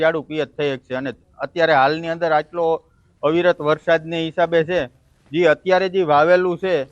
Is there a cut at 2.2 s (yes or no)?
yes